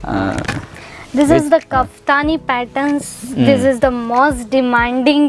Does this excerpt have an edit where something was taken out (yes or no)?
no